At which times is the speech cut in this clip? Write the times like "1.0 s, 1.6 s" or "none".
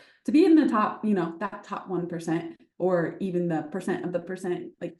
none